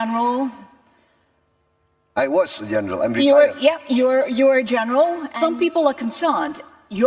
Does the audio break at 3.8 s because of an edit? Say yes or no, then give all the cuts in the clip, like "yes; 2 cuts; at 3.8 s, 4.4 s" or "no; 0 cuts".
no; 1 cut; at 5.2 s